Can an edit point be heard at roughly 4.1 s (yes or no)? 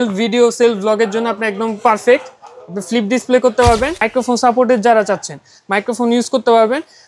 yes